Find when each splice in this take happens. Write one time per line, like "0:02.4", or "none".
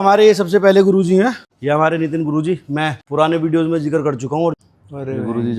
0:01.5
0:03.0
0:04.6